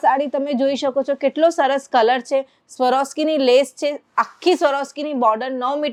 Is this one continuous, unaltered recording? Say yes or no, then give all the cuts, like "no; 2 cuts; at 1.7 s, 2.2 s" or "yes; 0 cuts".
yes; 0 cuts